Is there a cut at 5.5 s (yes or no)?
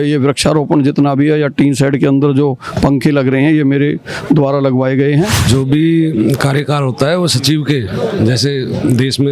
yes